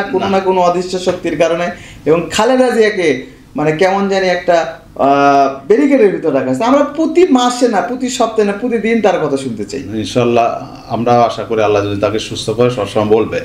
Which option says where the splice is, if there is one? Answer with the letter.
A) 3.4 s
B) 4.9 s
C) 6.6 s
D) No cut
D